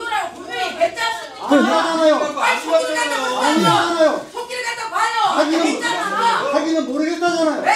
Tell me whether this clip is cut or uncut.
uncut